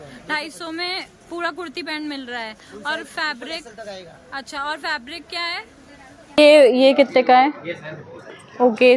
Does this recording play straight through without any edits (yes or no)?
no